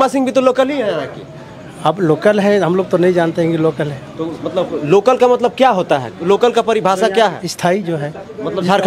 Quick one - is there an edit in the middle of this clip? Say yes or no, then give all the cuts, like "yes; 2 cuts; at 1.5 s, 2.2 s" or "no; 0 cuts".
no; 0 cuts